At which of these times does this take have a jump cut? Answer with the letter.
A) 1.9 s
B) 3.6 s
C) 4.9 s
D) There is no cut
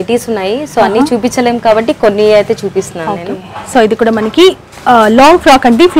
D